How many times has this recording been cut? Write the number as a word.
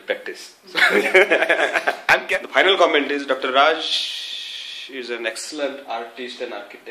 one